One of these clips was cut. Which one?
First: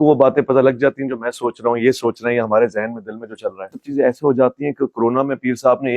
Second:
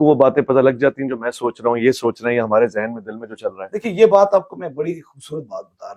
first; 1 cut; at 3.8 s

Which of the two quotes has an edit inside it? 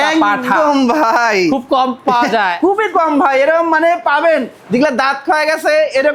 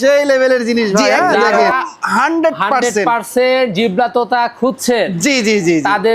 second; 1 cut; at 1.6 s

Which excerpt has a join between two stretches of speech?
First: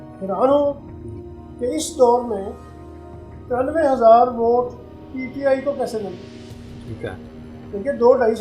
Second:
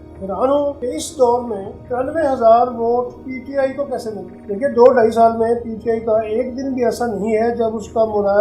second; 4 cuts; at 0.8 s, 1.7 s, 3.3 s, 4.3 s

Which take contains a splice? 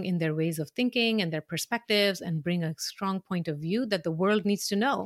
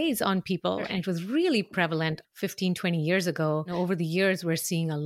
second; 3 cuts; at 0.9 s, 2.2 s, 3.7 s

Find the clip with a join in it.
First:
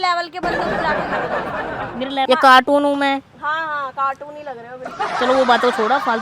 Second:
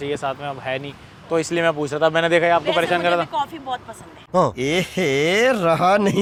first; 1 cut; at 2.2 s

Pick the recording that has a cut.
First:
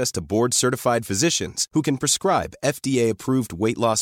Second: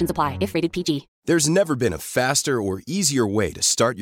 second; 1 cut; at 1.1 s

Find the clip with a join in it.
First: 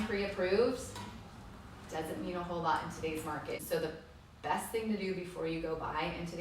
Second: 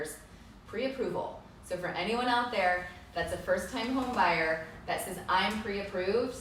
first; 1 cut; at 3.6 s

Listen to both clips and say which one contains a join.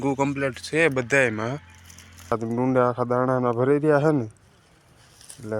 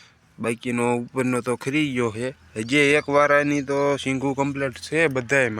first; 1 cut; at 2.3 s

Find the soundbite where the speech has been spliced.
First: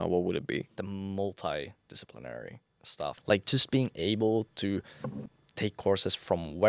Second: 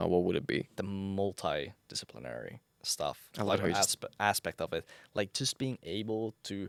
first; 2 cuts; at 3.1 s, 5.3 s

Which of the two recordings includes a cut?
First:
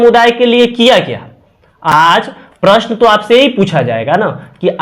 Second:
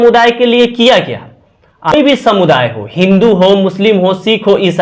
second; 1 cut; at 1.9 s

